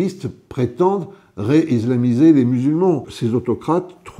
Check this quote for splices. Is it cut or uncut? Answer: cut